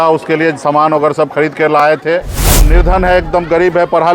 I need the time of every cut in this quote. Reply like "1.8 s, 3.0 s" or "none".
2.7 s